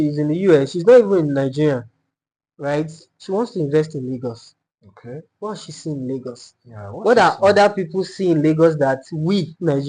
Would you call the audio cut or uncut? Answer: uncut